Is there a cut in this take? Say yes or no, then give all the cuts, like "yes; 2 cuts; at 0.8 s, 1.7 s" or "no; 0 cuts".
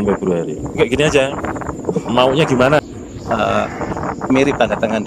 yes; 1 cut; at 2.8 s